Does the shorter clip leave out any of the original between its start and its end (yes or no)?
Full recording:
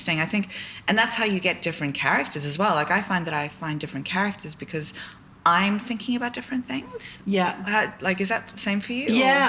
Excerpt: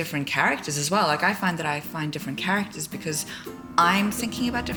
no